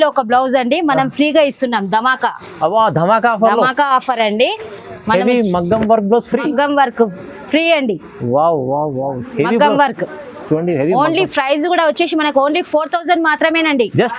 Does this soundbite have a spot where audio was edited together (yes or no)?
no